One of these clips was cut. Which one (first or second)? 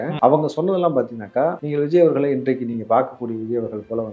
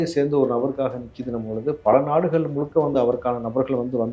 first